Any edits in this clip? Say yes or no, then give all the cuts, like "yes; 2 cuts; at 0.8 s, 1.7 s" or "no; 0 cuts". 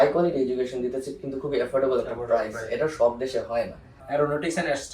yes; 1 cut; at 4.0 s